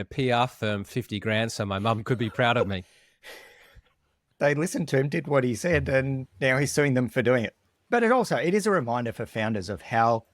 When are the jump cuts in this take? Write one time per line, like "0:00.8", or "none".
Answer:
0:03.0
0:04.3